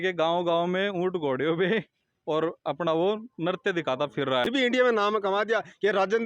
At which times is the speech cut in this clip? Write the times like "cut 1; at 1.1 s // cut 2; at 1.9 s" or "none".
cut 1; at 4.5 s